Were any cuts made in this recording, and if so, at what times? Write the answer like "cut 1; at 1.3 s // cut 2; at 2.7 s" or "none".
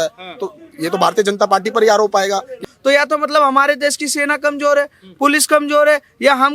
cut 1; at 2.6 s